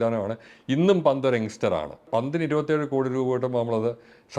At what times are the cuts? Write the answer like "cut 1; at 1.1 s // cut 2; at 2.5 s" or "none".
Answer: cut 1; at 2.1 s